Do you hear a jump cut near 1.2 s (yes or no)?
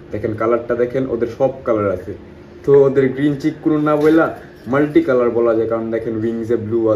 no